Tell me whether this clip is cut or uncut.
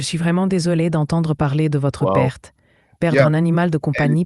uncut